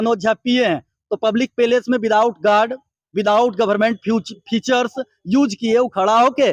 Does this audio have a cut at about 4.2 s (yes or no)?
no